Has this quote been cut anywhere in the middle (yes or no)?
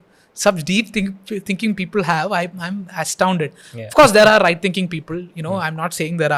no